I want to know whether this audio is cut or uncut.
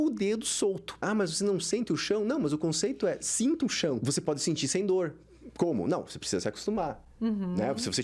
cut